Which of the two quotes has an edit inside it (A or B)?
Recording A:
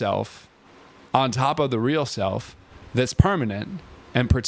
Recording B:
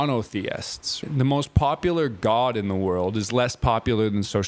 B